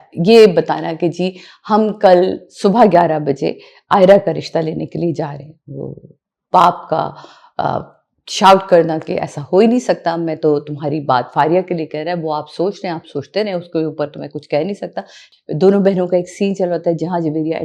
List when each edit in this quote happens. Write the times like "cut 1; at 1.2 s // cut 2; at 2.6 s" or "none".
cut 1; at 15.2 s